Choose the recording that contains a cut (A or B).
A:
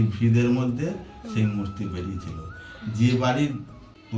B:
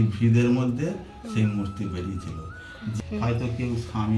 B